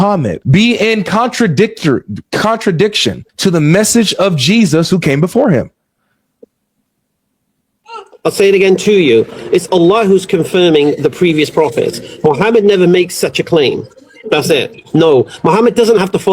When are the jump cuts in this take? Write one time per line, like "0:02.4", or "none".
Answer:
none